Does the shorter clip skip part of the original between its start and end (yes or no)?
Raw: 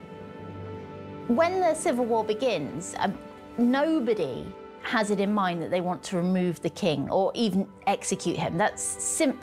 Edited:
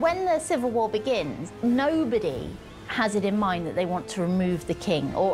yes